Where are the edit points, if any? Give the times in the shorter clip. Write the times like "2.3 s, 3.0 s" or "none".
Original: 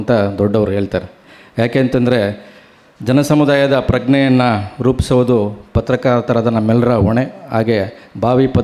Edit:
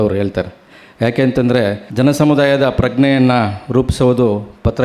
1.8 s